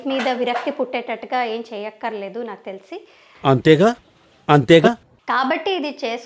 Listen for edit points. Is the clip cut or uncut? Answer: cut